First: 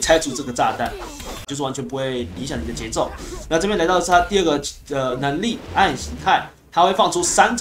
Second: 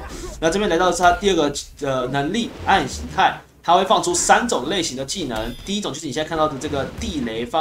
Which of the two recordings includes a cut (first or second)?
first